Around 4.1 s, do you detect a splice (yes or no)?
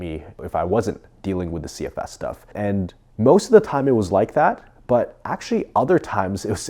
no